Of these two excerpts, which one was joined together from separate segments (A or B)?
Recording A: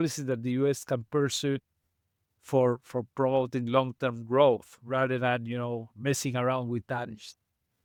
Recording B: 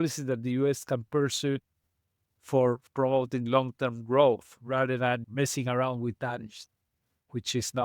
B